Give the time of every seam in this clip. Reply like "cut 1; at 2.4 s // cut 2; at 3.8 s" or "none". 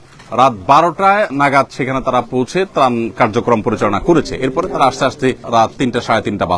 cut 1; at 1.3 s // cut 2; at 5.4 s

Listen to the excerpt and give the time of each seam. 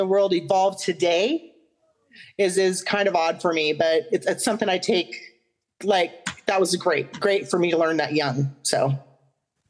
none

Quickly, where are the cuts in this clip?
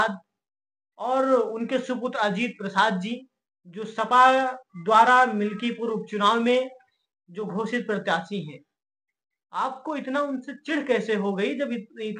none

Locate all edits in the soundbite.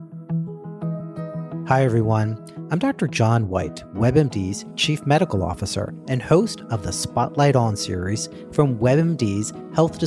cut 1; at 1.7 s

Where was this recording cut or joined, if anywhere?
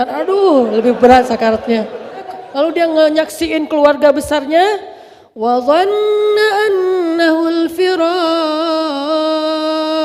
cut 1; at 2.4 s

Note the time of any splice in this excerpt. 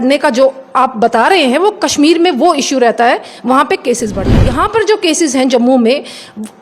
cut 1; at 4.4 s

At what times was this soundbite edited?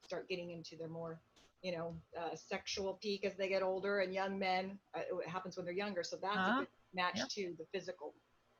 none

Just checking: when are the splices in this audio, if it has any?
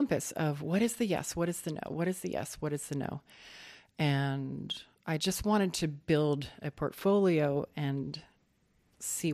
cut 1; at 5.2 s

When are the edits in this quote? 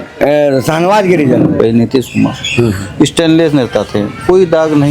cut 1; at 1.5 s

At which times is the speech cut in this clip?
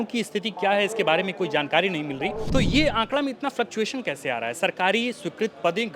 cut 1; at 2.4 s

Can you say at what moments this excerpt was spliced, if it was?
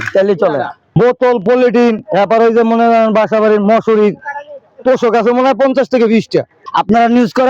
cut 1; at 0.9 s // cut 2; at 6.6 s

